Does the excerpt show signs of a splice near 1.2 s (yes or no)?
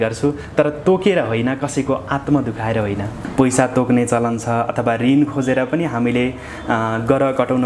no